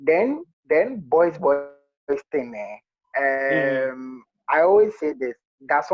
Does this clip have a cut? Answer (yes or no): no